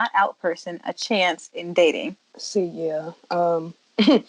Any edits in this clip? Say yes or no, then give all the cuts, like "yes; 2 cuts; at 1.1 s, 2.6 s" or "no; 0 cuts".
yes; 1 cut; at 2.2 s